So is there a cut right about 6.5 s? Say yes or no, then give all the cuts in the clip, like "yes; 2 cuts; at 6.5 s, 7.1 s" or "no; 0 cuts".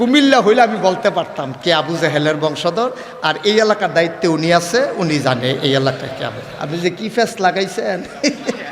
yes; 1 cut; at 6.5 s